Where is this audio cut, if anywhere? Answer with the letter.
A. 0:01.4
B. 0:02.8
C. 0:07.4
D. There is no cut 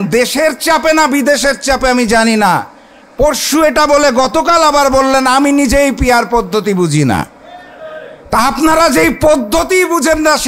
D